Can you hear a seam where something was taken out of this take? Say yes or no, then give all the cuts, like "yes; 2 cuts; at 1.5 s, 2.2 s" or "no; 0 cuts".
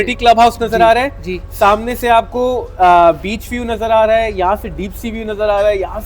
no; 0 cuts